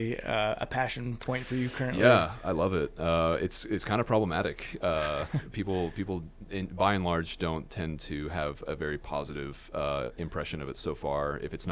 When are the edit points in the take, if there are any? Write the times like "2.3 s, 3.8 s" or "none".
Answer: none